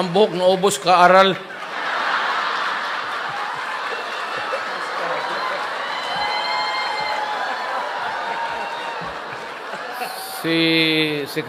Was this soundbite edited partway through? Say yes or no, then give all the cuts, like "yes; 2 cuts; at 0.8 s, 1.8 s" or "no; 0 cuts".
no; 0 cuts